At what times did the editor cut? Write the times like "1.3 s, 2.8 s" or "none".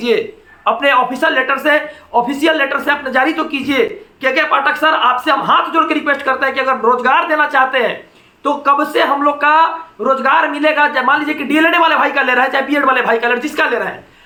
none